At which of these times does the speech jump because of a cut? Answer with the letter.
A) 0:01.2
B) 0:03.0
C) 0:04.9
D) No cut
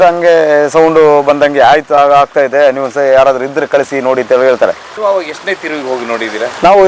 C